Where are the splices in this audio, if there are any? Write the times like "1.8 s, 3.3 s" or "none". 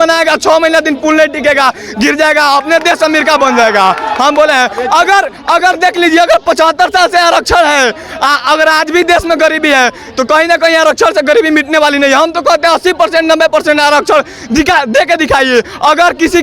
none

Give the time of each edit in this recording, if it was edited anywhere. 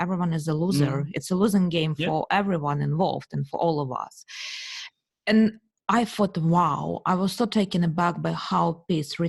none

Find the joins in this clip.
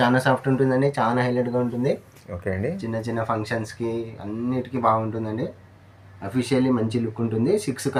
none

